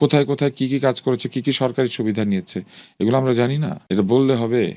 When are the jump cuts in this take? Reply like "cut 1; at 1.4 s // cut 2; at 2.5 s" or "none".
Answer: none